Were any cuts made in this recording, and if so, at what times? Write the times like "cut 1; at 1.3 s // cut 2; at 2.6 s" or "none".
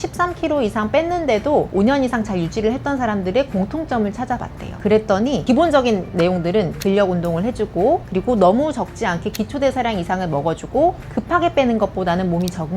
cut 1; at 6.8 s